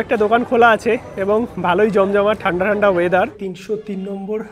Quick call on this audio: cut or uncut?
cut